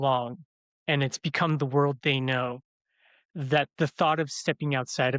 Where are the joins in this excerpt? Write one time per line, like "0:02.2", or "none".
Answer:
none